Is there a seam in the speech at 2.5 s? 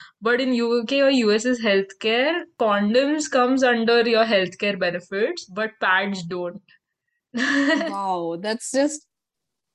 yes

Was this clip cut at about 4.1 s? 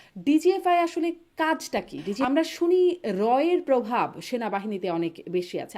no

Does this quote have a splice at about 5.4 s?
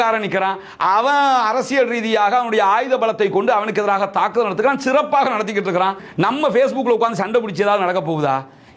no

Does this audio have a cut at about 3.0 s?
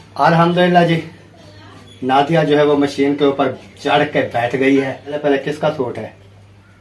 no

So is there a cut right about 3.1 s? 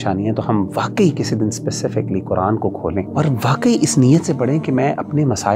yes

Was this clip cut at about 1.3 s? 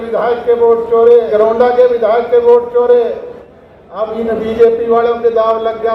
yes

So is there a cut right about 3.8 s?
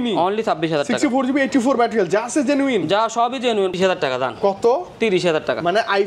yes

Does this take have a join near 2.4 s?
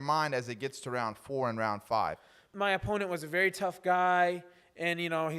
yes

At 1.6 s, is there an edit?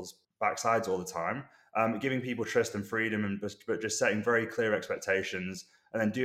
no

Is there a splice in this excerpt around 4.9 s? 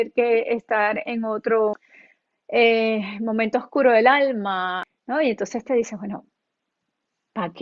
yes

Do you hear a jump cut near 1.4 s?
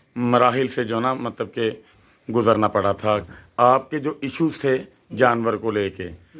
no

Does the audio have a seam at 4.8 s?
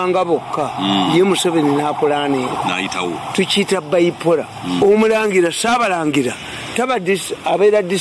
yes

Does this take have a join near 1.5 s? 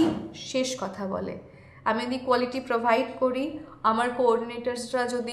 no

